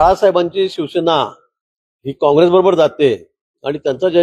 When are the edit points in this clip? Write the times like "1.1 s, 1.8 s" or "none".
none